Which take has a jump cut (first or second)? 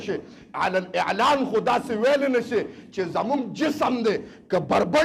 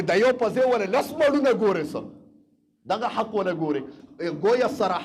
second